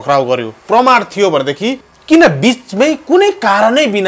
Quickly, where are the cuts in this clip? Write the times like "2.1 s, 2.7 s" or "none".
1.9 s